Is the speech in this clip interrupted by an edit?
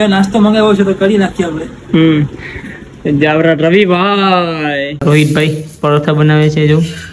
yes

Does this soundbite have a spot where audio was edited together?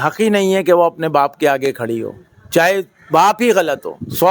no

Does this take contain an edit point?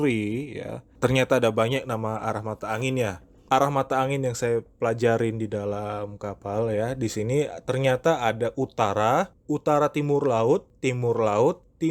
no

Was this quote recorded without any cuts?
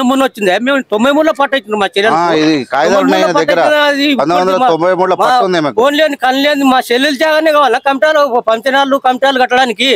yes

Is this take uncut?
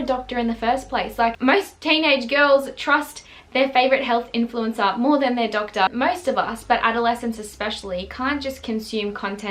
no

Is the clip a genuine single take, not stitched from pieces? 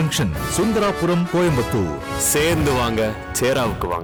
yes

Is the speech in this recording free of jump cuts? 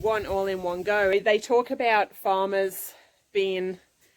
no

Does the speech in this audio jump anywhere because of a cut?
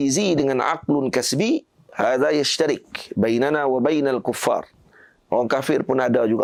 no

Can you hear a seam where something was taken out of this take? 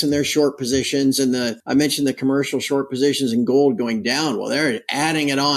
yes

